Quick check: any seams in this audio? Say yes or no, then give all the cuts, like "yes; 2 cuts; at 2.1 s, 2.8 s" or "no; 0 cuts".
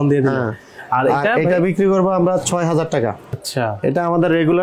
yes; 1 cut; at 3.3 s